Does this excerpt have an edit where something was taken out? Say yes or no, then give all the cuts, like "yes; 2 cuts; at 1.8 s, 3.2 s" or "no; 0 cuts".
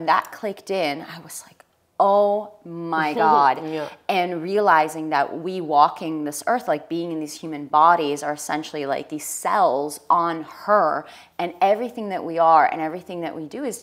no; 0 cuts